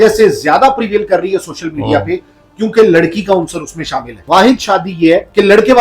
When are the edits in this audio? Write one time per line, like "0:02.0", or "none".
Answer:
0:04.2